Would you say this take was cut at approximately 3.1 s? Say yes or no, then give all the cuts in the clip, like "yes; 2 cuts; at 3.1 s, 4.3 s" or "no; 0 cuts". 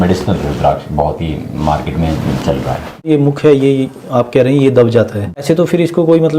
yes; 2 cuts; at 3.1 s, 5.4 s